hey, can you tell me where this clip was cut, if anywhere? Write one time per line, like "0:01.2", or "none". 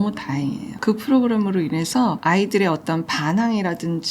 0:02.2